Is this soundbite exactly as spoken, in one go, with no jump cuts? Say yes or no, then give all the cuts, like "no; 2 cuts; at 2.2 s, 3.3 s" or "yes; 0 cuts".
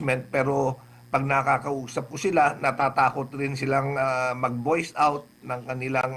yes; 0 cuts